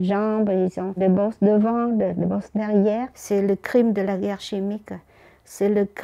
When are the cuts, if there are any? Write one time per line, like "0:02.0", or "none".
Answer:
0:03.2

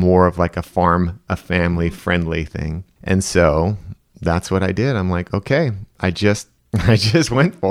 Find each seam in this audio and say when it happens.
0:02.9
0:06.6

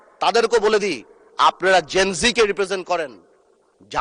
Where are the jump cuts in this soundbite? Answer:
none

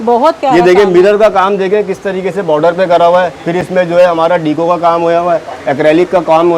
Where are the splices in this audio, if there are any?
none

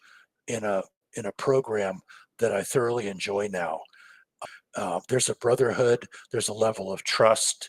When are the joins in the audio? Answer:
0:04.3

